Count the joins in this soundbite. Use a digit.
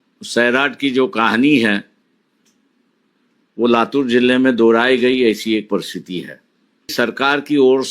1